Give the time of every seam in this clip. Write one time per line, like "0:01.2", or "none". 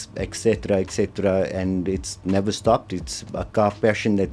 none